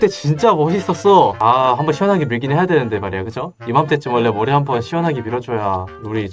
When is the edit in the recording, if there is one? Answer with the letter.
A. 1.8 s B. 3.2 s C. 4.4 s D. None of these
D